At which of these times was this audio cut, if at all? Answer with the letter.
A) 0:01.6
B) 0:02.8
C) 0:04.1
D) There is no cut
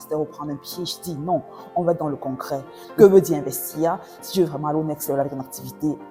B